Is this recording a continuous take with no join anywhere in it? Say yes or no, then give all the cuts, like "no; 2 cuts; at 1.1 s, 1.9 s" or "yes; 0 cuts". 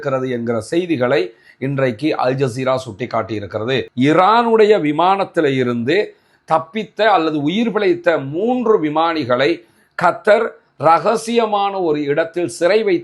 no; 1 cut; at 3.9 s